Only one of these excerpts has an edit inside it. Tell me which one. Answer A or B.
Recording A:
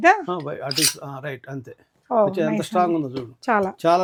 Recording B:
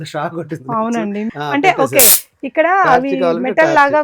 B